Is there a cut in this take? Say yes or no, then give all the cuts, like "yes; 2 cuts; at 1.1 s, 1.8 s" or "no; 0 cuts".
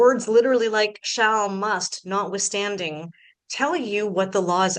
no; 0 cuts